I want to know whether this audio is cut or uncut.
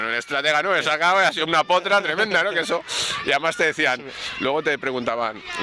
uncut